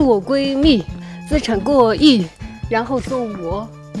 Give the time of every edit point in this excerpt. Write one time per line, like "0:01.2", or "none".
none